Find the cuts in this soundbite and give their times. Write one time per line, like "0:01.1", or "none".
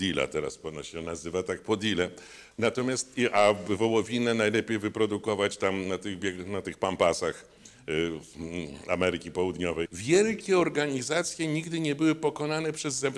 0:10.0